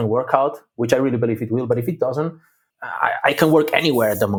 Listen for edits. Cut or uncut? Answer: uncut